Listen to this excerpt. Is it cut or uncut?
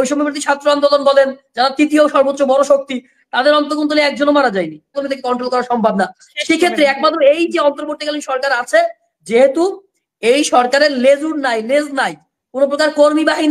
cut